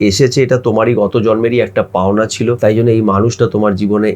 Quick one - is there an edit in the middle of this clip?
yes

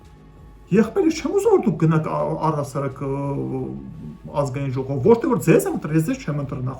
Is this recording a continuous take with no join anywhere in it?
yes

